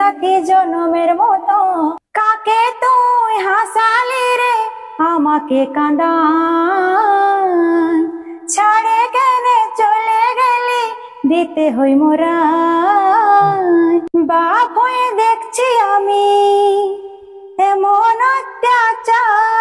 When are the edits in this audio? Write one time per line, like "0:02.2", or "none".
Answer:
0:01.9
0:14.1